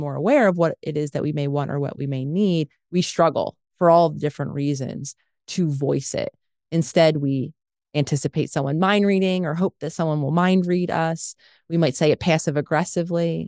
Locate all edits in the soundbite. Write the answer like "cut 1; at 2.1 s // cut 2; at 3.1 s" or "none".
none